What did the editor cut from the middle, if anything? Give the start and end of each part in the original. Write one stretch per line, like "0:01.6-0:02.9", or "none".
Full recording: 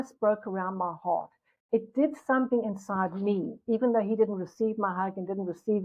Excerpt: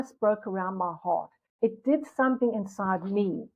0:01.4-0:01.5